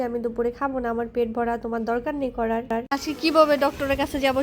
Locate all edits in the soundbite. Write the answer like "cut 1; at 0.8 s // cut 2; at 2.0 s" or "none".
none